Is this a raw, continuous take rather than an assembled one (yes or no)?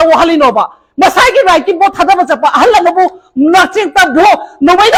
yes